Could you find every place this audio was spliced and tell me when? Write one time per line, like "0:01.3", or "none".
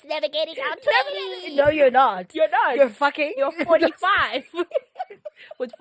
none